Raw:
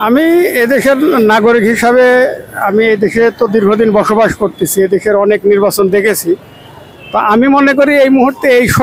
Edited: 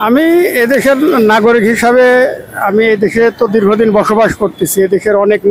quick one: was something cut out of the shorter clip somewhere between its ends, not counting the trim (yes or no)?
no